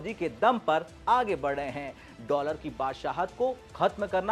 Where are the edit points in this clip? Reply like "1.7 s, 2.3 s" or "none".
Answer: none

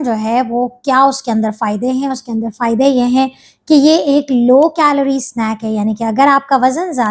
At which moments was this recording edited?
none

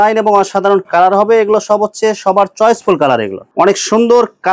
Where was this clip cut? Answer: 3.4 s

